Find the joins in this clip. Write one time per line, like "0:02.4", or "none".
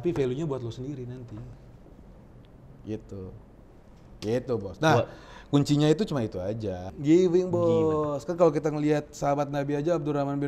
0:06.9